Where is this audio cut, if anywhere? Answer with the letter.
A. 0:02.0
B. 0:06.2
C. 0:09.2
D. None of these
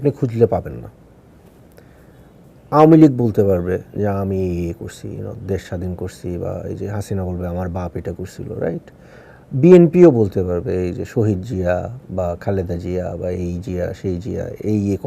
A